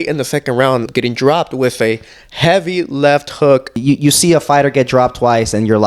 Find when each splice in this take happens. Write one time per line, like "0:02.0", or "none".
0:00.9
0:03.8